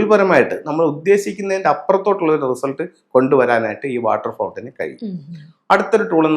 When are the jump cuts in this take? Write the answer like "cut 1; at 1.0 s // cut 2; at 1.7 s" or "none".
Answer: none